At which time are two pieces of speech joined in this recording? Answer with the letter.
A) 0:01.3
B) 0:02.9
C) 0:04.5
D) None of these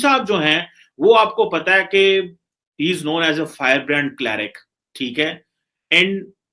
D